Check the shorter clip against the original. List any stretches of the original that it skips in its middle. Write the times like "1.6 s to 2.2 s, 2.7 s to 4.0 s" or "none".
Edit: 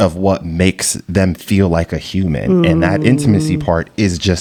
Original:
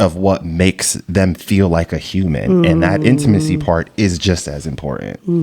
none